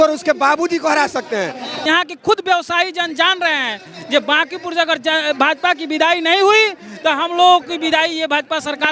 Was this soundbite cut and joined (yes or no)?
yes